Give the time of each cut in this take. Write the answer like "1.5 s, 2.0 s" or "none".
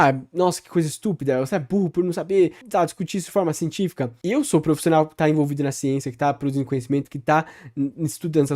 2.6 s, 4.1 s